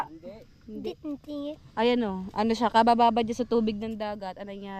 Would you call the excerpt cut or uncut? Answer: uncut